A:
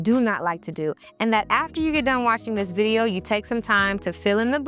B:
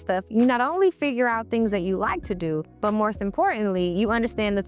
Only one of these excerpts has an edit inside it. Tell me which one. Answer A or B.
A